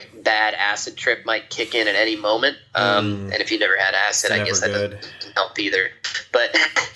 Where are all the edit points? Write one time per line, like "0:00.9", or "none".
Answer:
none

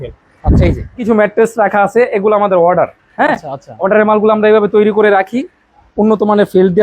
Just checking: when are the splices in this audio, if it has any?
0:01.1

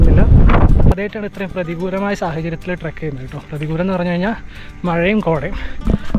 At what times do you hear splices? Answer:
0:00.9

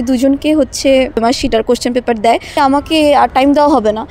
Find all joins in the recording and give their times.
0:01.2
0:02.5

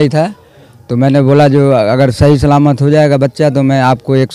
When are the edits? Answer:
none

